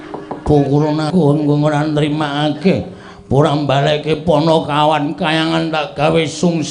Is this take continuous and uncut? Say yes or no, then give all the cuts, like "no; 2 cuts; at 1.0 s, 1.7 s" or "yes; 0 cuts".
no; 1 cut; at 1.1 s